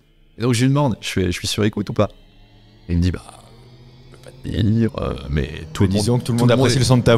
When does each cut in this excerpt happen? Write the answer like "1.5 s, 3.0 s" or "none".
none